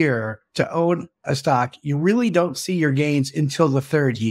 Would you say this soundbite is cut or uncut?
uncut